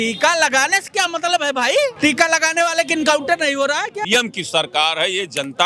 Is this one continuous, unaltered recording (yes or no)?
no